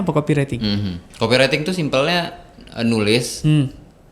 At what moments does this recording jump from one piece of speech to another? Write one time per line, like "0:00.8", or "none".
none